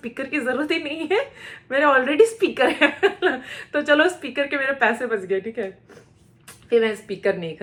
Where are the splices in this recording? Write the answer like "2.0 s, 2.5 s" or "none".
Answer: none